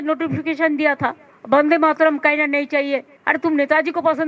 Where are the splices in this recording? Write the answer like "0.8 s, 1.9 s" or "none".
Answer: 3.1 s